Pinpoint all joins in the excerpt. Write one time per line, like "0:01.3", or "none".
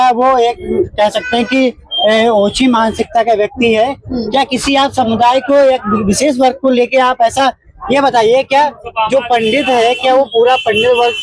none